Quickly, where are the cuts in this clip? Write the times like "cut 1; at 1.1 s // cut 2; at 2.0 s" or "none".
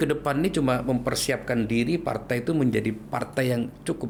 none